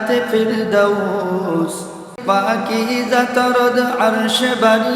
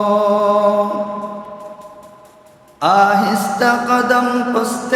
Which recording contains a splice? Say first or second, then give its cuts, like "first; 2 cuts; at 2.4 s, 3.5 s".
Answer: first; 1 cut; at 2.2 s